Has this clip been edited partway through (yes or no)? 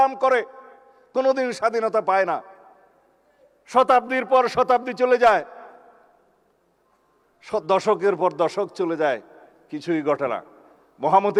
no